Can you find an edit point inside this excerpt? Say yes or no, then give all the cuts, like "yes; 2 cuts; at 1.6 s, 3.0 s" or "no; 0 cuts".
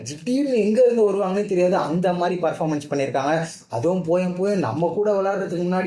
no; 0 cuts